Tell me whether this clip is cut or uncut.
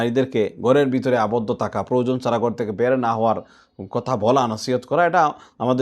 uncut